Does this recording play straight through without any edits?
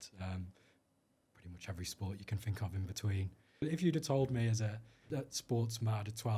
no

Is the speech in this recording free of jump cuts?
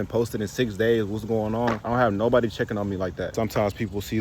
no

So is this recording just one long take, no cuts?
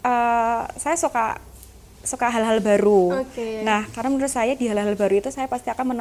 yes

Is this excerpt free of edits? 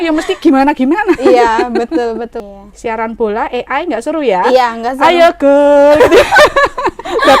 no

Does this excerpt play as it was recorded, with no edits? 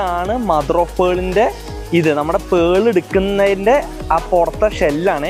yes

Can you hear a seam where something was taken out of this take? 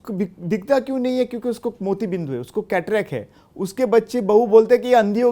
no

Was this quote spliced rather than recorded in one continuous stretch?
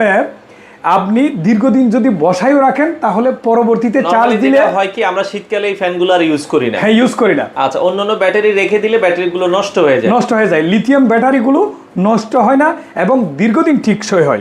no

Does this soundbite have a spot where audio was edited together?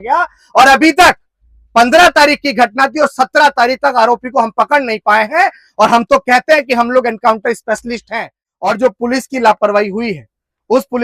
yes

